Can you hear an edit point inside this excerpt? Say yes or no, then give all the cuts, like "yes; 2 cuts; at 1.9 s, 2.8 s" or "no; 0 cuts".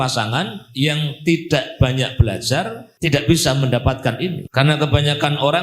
yes; 2 cuts; at 2.8 s, 4.4 s